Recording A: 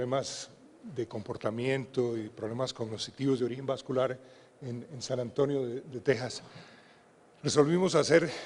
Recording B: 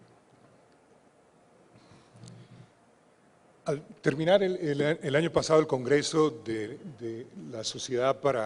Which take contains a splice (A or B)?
A